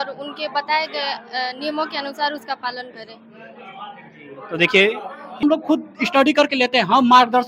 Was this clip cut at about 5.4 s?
yes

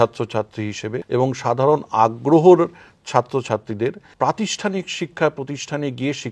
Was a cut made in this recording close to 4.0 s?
yes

